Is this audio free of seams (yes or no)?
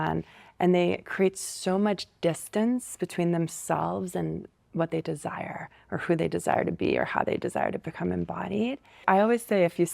no